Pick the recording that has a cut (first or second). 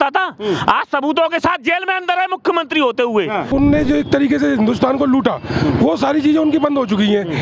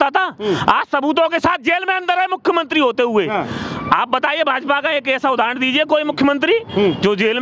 first